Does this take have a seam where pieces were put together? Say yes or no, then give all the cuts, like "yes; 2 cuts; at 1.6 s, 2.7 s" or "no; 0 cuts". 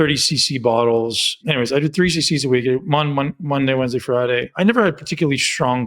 yes; 2 cuts; at 1.3 s, 4.5 s